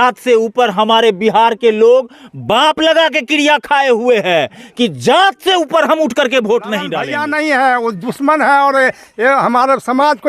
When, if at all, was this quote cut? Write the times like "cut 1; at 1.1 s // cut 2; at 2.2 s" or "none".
cut 1; at 7.0 s